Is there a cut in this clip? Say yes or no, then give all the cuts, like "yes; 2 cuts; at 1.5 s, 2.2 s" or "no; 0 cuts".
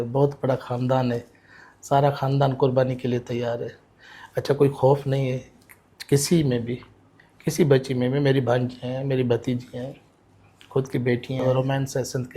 yes; 1 cut; at 11.4 s